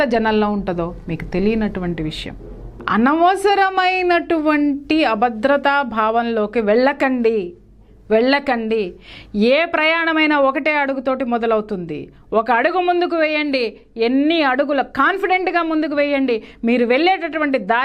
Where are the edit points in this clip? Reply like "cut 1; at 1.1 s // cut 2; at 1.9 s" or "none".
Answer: cut 1; at 2.7 s